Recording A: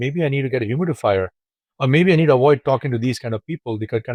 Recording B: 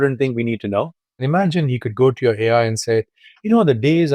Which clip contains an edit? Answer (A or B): B